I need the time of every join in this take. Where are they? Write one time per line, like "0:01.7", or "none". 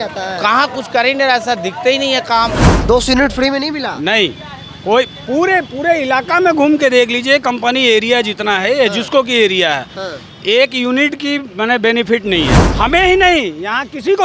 0:02.8
0:12.6